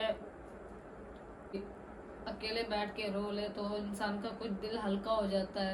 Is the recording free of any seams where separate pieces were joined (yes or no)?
no